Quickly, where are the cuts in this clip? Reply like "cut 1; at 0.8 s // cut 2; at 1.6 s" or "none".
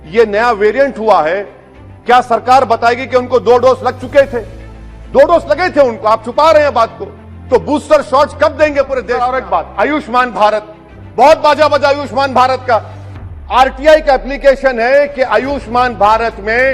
cut 1; at 9.1 s